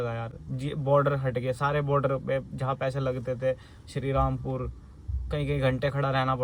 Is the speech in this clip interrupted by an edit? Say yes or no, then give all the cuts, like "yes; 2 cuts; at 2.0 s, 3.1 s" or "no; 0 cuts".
no; 0 cuts